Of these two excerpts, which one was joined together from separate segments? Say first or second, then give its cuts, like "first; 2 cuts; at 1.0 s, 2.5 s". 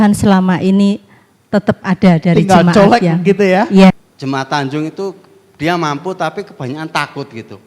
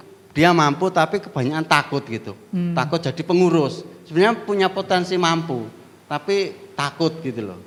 first; 1 cut; at 3.9 s